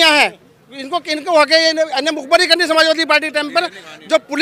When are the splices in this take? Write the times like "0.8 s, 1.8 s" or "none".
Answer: none